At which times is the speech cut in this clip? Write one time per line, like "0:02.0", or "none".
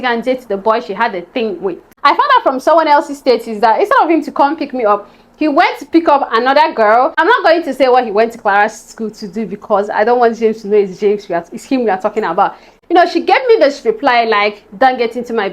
0:01.9
0:07.2
0:12.7

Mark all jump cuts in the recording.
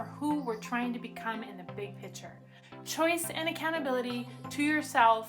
0:02.6

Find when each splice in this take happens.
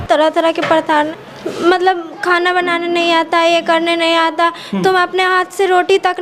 0:01.2

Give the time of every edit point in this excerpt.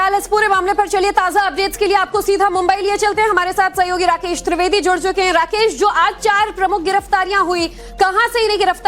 0:06.8

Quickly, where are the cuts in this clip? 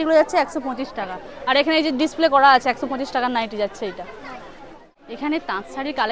0:04.8

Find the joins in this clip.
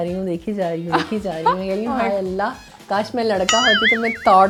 none

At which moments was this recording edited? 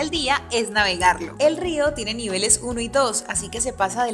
0:01.3

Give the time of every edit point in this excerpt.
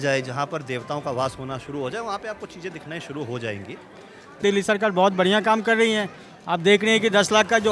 0:04.4

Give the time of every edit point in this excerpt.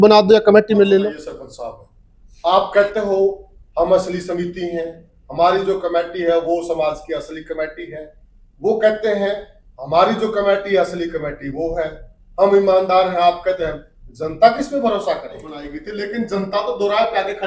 0:01.0
0:15.8

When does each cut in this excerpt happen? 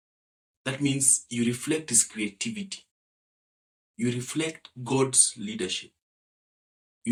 none

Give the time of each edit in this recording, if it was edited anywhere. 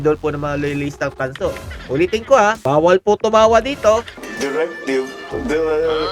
0:04.2

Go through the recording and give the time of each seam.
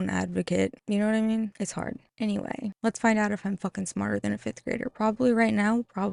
none

